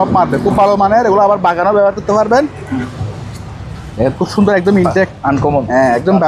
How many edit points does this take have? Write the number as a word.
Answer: one